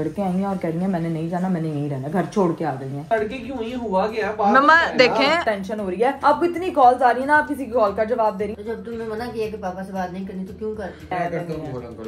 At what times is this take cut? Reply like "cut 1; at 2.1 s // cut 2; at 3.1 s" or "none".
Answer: cut 1; at 3.0 s // cut 2; at 5.7 s // cut 3; at 8.6 s // cut 4; at 11.1 s